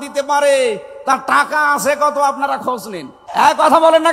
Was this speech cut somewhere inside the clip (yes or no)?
yes